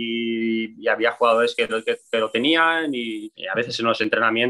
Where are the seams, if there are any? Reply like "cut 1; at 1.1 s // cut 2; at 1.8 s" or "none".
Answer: cut 1; at 3.2 s